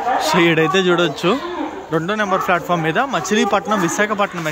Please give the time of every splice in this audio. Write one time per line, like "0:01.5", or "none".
none